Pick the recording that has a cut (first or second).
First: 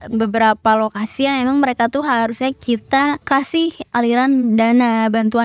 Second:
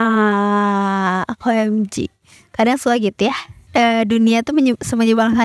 first